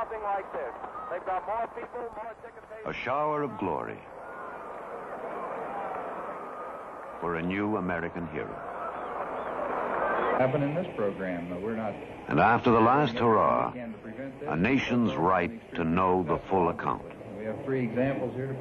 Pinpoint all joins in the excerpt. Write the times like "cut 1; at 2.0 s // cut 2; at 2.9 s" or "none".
none